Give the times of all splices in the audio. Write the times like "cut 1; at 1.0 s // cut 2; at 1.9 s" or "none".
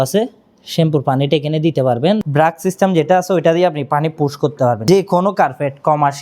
cut 1; at 2.2 s // cut 2; at 4.8 s